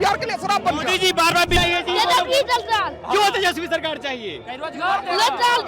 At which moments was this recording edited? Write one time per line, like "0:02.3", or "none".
0:01.6